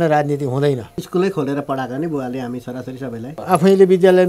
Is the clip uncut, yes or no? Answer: no